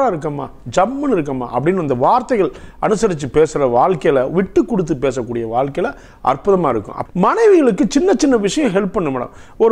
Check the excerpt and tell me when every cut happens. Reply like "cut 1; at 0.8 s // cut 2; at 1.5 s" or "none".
cut 1; at 7.1 s